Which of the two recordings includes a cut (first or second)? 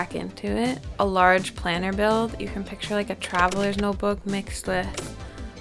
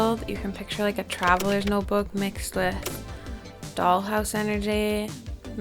first